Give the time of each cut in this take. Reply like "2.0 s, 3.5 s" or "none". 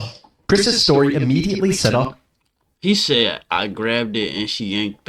none